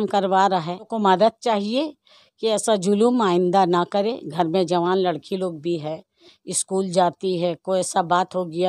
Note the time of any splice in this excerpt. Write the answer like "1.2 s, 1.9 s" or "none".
0.9 s